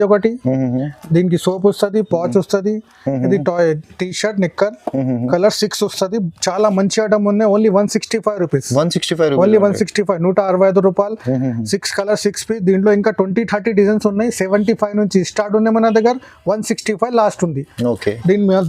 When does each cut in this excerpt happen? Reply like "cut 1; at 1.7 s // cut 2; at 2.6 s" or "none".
none